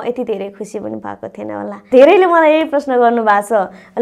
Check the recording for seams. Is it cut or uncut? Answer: cut